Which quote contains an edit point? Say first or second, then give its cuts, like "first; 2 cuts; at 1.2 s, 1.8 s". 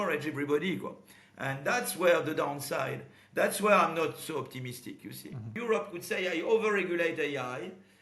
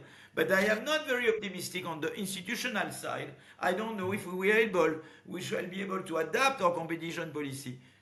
first; 1 cut; at 5.5 s